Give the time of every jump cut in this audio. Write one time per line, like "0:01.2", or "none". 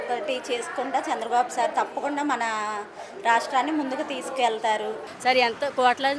0:05.0